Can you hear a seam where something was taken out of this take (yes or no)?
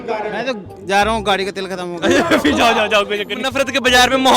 yes